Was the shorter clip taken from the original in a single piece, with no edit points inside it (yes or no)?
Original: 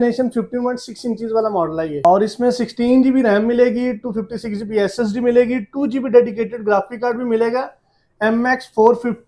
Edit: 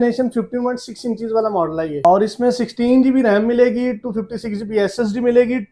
yes